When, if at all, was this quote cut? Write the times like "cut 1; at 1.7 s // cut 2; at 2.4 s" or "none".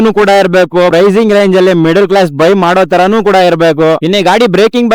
cut 1; at 4.0 s